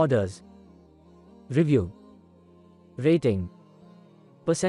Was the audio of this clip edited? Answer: no; 0 cuts

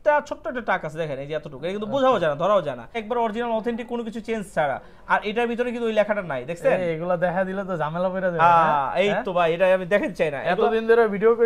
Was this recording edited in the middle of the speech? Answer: yes; 1 cut; at 3.0 s

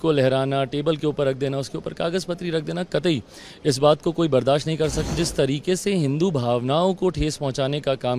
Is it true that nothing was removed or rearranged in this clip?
no; 1 cut; at 5.1 s

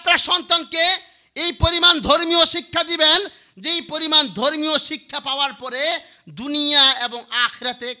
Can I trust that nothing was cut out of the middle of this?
yes; 0 cuts

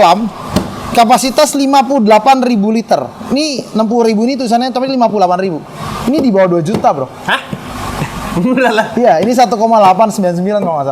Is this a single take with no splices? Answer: yes; 0 cuts

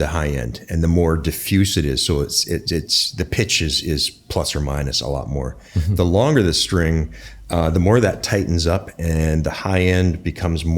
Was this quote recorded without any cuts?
yes; 0 cuts

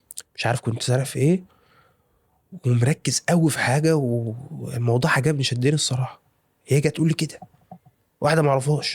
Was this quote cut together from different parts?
no; 0 cuts

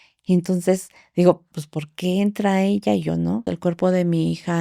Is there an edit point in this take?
yes; 1 cut; at 3.5 s

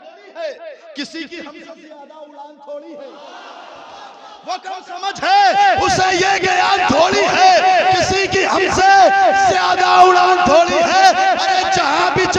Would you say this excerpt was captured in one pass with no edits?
yes; 0 cuts

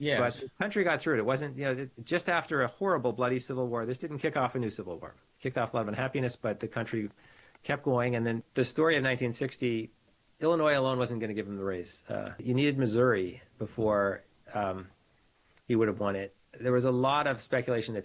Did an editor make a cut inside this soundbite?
yes; 3 cuts; at 8.4 s, 10.1 s, 12.3 s

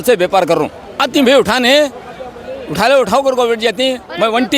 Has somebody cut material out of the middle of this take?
yes; 1 cut; at 1.0 s

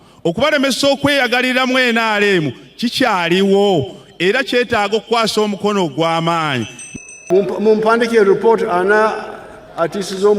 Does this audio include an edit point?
yes; 1 cut; at 7.2 s

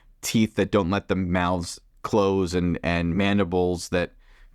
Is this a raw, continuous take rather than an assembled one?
yes; 0 cuts

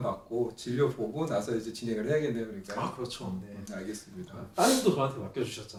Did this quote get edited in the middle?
no; 0 cuts

